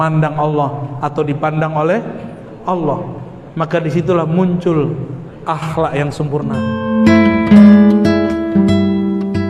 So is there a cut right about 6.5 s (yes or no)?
yes